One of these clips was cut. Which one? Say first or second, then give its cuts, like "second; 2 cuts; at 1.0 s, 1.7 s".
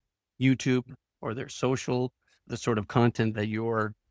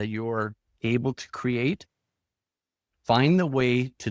first; 1 cut; at 2.5 s